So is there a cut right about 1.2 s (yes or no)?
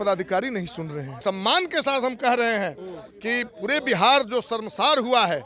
yes